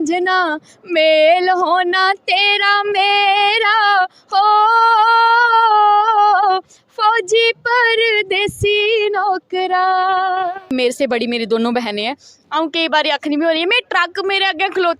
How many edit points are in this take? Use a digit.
1